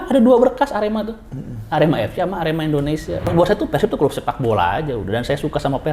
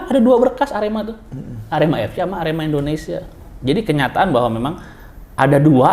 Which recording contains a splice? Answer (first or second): first